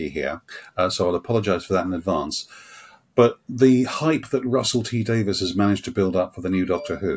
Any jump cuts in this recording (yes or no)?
no